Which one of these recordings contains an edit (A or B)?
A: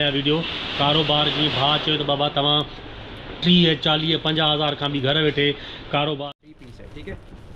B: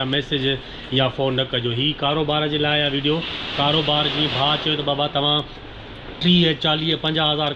A